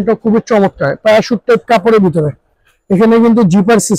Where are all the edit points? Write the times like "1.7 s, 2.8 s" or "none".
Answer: none